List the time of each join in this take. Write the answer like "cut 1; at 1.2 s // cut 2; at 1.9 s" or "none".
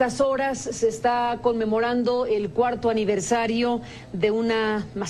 cut 1; at 3.1 s